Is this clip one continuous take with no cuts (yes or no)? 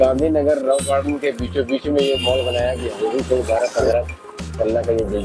no